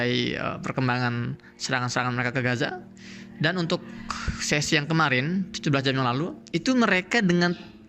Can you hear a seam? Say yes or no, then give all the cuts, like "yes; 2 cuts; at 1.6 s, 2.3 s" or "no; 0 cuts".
yes; 1 cut; at 6.4 s